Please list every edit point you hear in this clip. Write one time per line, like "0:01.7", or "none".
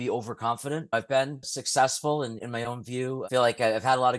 0:00.9
0:02.4